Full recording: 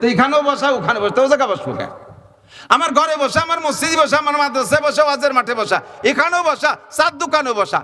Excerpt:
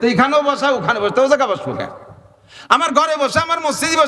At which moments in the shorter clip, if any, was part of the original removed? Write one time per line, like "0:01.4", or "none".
none